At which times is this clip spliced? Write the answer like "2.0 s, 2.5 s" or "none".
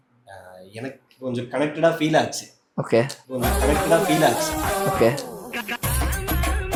none